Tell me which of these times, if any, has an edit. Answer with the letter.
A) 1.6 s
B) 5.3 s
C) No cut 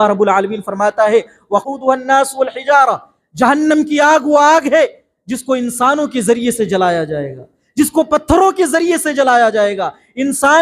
A